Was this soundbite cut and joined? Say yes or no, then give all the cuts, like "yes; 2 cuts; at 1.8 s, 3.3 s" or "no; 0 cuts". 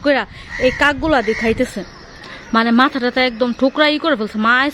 no; 0 cuts